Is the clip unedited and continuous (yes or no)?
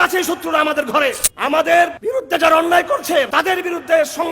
no